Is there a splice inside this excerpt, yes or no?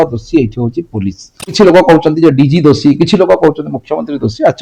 yes